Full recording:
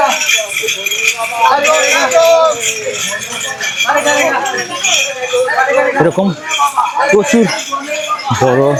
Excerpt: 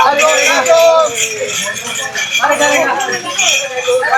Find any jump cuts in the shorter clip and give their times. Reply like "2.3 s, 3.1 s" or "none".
none